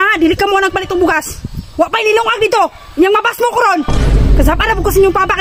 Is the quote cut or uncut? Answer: uncut